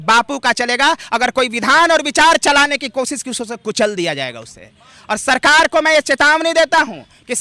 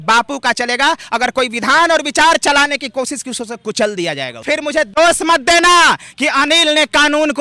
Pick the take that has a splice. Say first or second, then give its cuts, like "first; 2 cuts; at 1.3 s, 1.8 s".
second; 1 cut; at 4.4 s